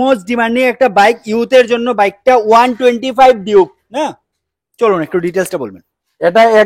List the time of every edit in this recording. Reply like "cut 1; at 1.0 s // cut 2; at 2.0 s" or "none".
none